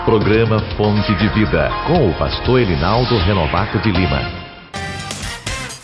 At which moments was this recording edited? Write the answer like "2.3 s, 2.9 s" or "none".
none